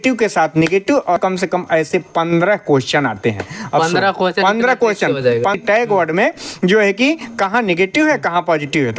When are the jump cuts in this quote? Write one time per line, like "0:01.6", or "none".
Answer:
0:01.2
0:05.6